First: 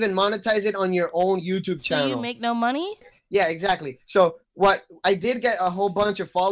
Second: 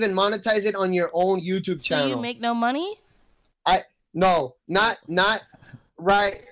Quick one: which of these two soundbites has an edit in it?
first; 1 cut; at 3.1 s

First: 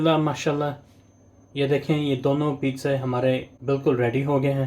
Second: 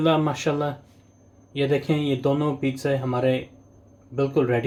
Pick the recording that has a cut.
first; 1 cut; at 3.5 s

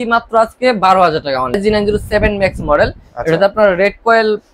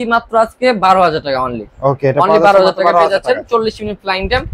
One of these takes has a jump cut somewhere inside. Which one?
first; 1 cut; at 1.5 s

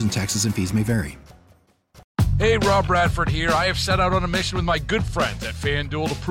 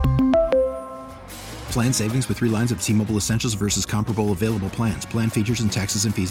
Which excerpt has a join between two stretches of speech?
first; 1 cut; at 2.0 s

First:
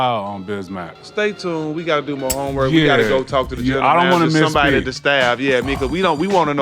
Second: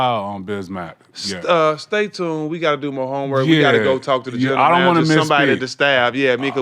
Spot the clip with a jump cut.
first; 1 cut; at 1.1 s

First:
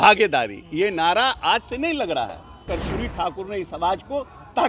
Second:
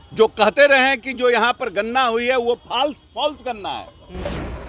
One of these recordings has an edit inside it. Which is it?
first; 1 cut; at 2.7 s

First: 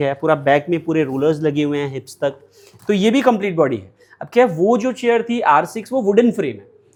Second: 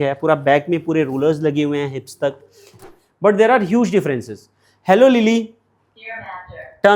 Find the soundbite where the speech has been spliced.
second; 1 cut; at 2.7 s

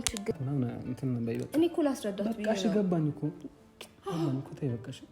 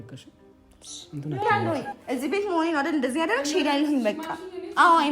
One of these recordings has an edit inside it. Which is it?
second; 1 cut; at 1.5 s

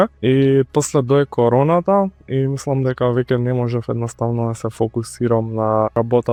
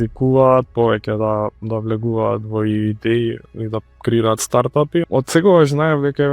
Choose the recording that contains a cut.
second; 1 cut; at 5.1 s

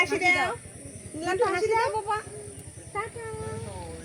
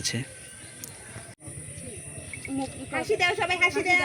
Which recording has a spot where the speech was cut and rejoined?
second; 1 cut; at 1.4 s

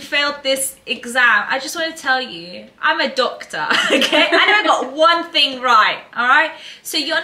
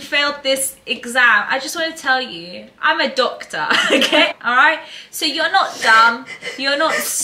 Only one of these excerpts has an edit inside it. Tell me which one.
second; 1 cut; at 4.3 s

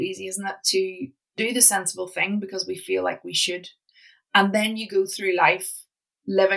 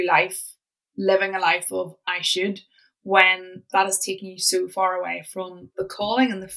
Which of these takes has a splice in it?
first; 1 cut; at 1.4 s

